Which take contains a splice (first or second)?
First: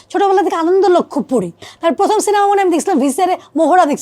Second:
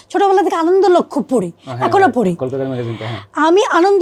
first